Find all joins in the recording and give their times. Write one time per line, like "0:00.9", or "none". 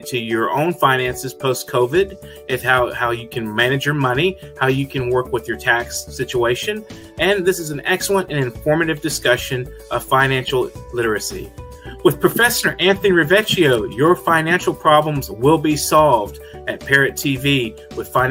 none